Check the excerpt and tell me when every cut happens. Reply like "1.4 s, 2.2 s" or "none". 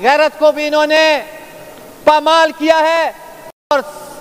none